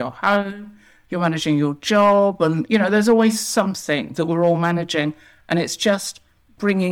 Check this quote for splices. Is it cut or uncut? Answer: uncut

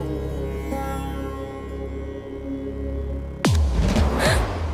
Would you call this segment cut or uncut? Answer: uncut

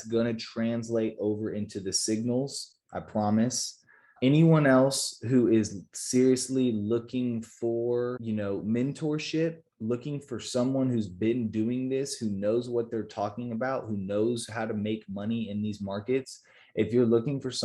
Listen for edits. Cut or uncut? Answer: cut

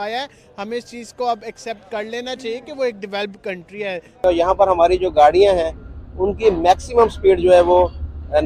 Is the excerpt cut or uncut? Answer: cut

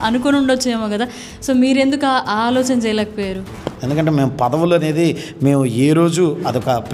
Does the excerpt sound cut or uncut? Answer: cut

